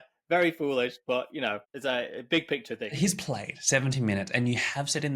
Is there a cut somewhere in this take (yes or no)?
yes